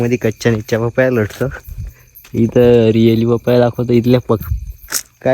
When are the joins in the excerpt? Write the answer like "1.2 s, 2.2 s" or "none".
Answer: 2.1 s